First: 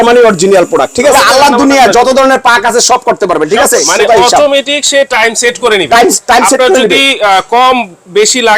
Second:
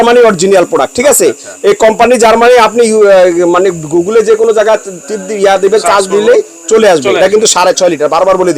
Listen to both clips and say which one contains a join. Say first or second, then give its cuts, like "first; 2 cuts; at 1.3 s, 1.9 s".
first; 2 cuts; at 1.1 s, 3.8 s